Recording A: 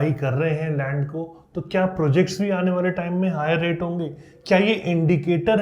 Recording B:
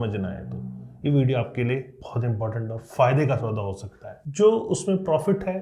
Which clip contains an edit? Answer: B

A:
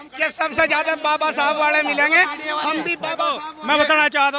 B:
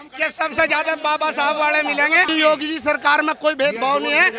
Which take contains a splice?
B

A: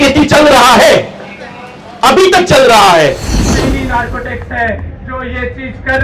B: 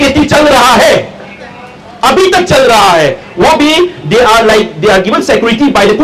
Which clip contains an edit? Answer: A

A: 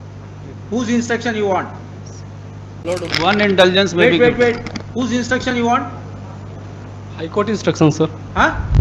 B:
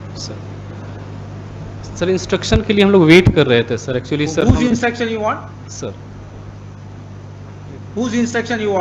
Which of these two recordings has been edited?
A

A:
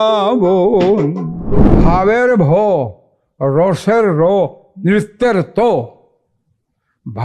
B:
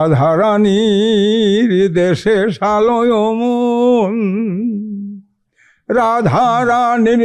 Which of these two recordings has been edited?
A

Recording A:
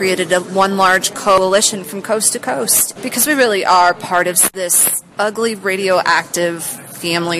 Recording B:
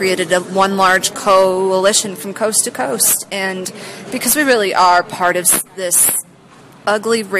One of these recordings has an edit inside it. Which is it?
A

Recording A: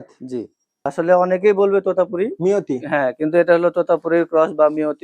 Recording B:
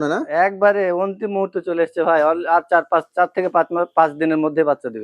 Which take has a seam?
A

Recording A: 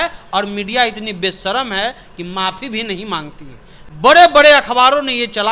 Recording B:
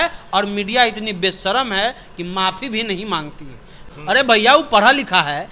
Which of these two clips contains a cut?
B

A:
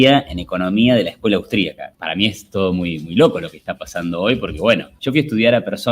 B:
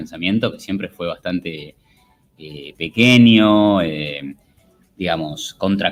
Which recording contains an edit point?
A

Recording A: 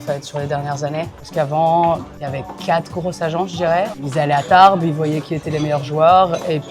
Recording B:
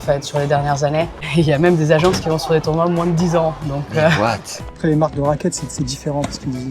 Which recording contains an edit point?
B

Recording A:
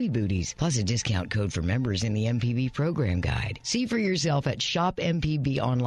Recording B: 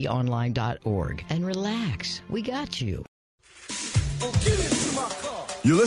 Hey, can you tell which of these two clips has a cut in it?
B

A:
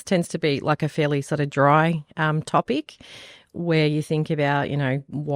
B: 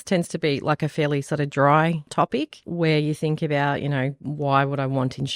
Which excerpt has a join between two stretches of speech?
B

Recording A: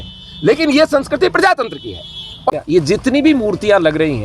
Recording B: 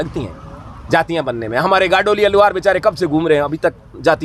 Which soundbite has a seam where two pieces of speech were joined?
A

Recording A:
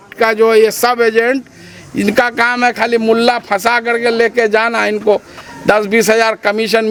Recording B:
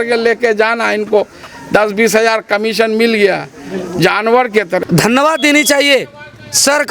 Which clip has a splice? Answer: B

